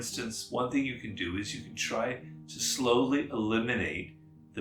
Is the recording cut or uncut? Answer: uncut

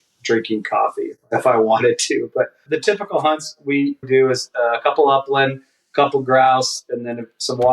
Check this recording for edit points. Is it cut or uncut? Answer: cut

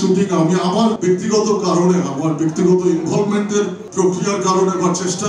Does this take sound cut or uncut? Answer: cut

